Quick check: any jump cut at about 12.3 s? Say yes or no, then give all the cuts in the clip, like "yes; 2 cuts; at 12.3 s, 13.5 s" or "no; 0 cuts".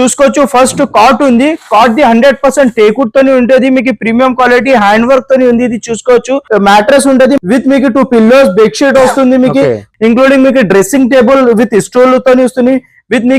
no; 3 cuts; at 6.4 s, 7.4 s, 9.9 s